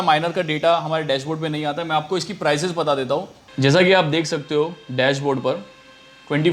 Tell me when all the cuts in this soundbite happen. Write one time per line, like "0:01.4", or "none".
0:03.4

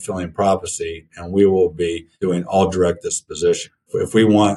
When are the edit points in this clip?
0:02.1

